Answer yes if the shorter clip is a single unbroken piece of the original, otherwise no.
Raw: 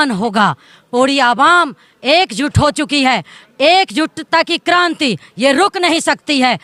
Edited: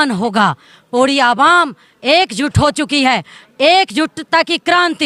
yes